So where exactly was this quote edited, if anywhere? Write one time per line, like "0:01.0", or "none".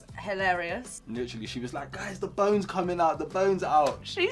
0:01.0